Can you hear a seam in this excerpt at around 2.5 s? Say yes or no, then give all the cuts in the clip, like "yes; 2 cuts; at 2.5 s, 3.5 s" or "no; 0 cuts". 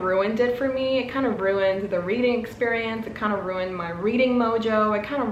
no; 0 cuts